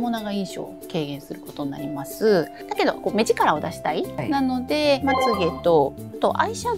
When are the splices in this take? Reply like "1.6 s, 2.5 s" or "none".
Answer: 2.6 s, 5.0 s